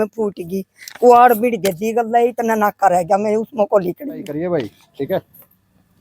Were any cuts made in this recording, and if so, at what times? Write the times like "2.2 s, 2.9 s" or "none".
4.3 s